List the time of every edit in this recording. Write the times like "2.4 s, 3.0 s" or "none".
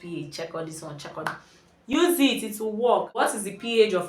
3.2 s